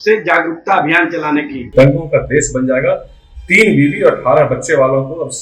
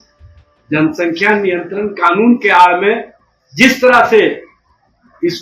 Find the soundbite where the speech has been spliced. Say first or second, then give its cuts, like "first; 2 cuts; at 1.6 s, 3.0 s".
first; 1 cut; at 1.6 s